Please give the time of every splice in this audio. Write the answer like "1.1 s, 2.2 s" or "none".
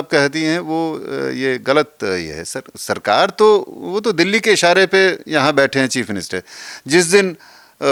none